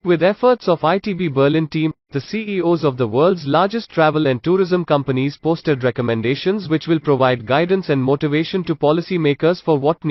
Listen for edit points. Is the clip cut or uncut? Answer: uncut